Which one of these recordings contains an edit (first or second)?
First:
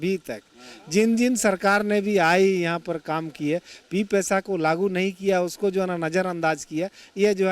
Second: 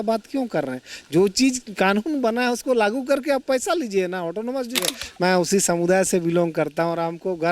second